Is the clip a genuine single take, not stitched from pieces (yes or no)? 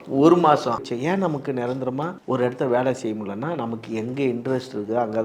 no